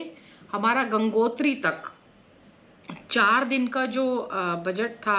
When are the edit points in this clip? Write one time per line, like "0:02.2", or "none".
none